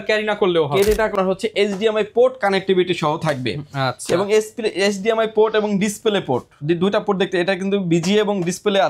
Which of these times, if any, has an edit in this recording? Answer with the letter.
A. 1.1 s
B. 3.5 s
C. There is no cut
A